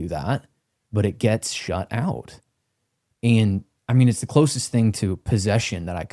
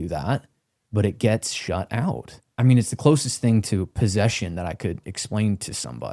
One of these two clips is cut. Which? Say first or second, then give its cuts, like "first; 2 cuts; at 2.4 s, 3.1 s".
second; 1 cut; at 2.4 s